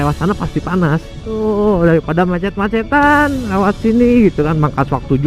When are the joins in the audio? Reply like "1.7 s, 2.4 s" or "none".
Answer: 1.2 s